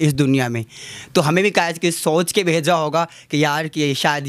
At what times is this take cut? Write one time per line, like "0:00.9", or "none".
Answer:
none